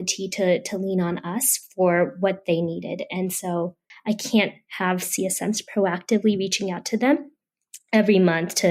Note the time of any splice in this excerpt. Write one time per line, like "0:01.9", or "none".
0:03.9